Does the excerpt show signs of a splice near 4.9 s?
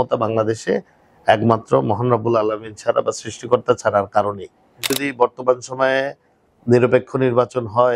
yes; 1 cut; at 4.9 s

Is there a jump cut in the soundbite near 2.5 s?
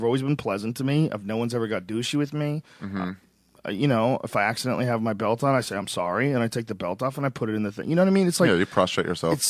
yes; 1 cut; at 2.5 s

